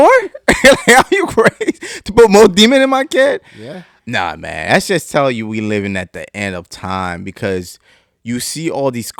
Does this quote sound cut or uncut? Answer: uncut